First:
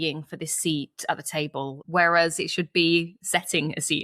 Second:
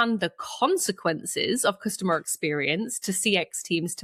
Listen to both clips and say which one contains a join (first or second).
first